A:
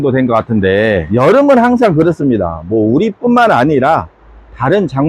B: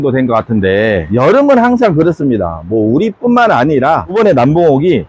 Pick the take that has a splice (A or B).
B